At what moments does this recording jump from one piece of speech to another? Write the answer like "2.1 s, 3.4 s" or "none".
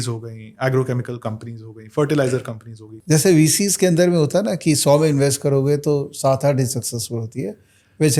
2.9 s